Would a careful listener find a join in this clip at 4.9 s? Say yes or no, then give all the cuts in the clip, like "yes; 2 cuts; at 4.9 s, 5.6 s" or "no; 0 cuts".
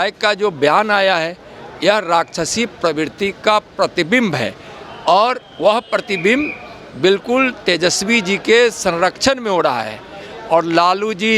no; 0 cuts